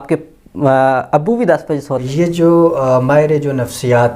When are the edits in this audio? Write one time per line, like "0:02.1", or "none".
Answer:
0:01.9